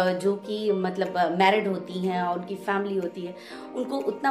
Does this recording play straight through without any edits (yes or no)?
yes